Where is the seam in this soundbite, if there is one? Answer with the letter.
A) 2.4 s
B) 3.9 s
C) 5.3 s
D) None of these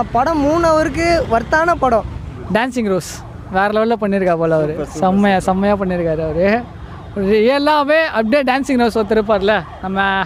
D